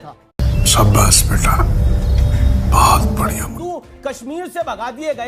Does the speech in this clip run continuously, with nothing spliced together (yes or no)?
no